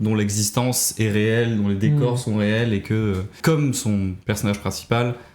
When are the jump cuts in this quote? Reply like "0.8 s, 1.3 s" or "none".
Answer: 3.4 s